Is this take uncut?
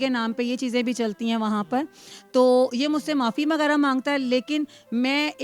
yes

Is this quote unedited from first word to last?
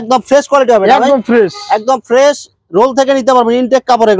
yes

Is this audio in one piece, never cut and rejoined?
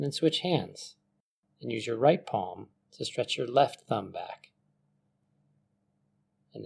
no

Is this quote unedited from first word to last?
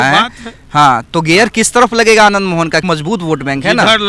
no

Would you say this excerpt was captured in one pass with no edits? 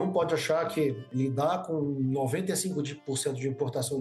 no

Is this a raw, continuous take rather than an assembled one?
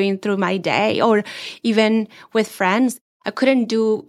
no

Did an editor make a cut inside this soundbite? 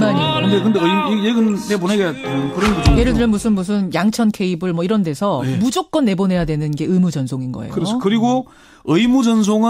yes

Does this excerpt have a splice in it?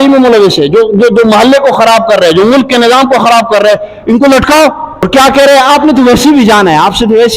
yes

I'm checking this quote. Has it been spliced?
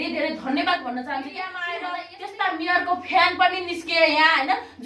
yes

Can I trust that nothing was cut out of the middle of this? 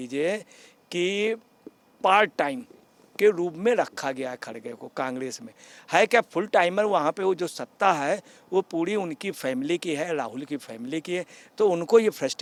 yes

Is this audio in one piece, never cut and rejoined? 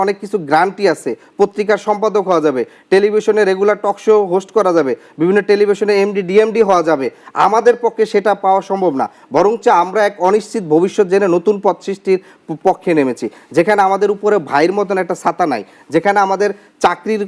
yes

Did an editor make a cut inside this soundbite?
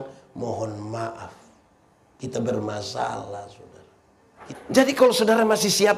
yes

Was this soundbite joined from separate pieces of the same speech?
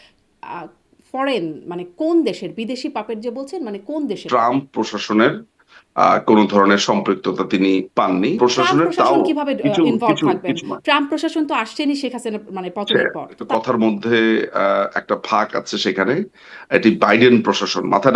yes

